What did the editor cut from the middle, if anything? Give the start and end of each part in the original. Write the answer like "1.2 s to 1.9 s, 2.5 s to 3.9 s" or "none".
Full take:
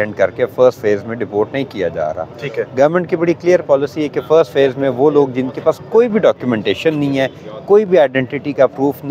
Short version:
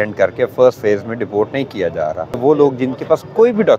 2.4 s to 4.9 s